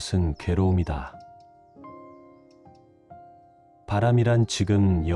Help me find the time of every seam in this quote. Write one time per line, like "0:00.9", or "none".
none